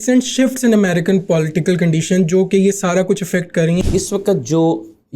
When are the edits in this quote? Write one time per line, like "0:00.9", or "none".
0:03.8